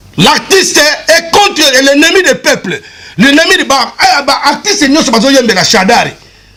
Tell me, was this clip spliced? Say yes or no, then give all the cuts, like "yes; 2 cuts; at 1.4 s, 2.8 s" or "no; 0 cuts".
no; 0 cuts